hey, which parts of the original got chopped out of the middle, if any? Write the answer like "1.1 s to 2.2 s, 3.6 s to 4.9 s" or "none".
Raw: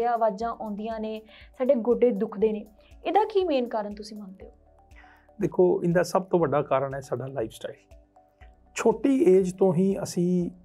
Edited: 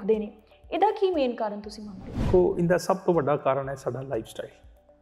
4.6 s to 5.5 s

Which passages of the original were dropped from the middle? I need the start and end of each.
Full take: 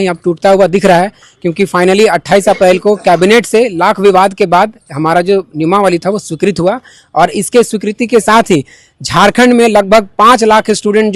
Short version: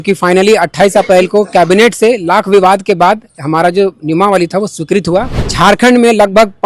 6.9 s to 9.0 s

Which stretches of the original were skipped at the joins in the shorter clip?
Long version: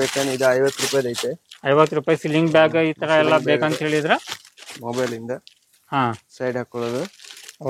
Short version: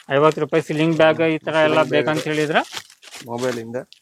none

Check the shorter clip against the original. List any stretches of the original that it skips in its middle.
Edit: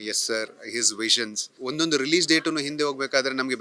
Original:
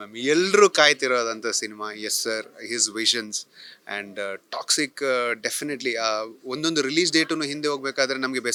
3.5 s to 6.4 s

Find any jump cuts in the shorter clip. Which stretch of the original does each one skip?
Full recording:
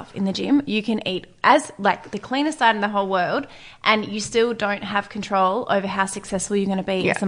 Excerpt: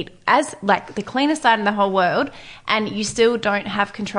none

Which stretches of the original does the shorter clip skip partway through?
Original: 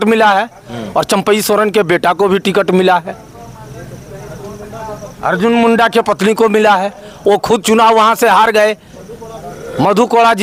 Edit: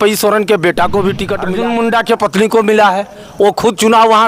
2.6 s to 5.2 s

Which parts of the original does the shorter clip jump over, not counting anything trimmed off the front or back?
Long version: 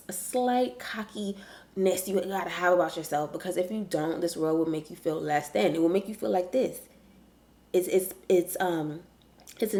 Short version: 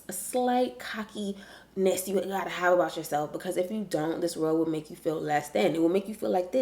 none

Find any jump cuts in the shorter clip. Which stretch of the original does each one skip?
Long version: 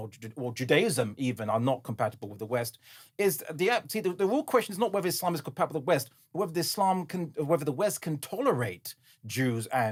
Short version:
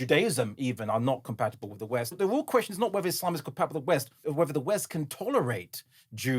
2.8 s to 4.2 s, 6.2 s to 7.3 s

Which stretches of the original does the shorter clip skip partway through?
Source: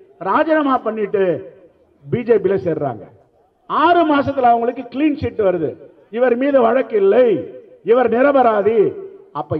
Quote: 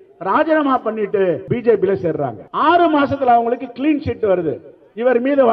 1.4 s to 2.1 s, 3.0 s to 3.6 s

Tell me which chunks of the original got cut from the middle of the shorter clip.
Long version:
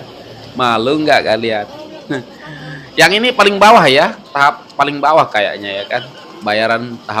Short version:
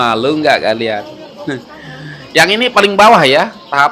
none

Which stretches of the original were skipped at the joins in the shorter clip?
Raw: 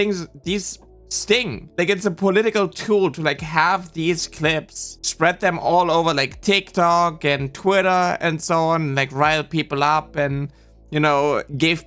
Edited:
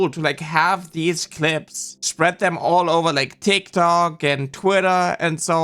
none

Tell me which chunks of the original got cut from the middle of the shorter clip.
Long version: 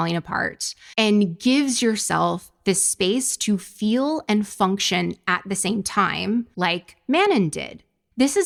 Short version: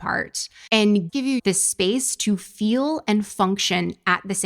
1.4 s to 2.3 s

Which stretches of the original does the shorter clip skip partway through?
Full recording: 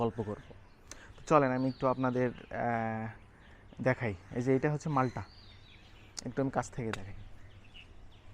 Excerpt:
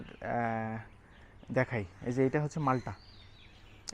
none

